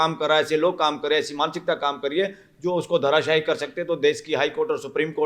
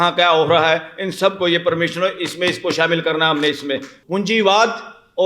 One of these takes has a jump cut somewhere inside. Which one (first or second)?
second